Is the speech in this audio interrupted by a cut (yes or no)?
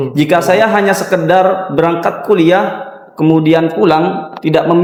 no